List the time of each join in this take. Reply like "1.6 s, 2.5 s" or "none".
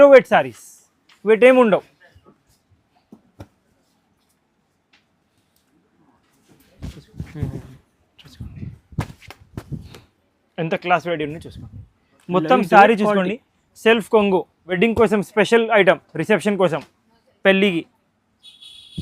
14.8 s